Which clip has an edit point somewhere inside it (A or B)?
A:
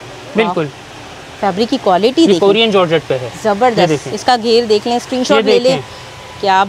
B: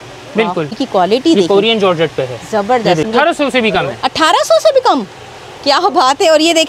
B